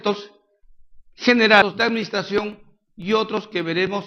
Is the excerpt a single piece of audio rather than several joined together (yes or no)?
yes